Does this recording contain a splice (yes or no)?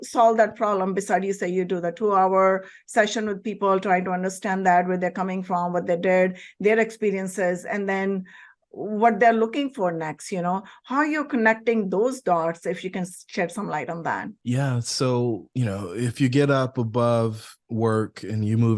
yes